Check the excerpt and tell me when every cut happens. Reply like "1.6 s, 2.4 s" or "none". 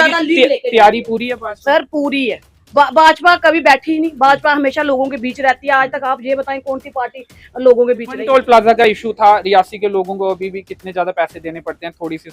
8.1 s